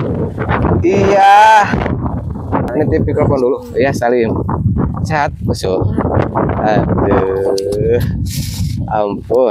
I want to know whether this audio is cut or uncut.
cut